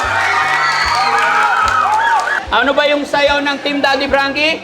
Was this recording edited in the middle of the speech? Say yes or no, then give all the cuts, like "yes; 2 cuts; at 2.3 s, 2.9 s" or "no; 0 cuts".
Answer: yes; 1 cut; at 2.4 s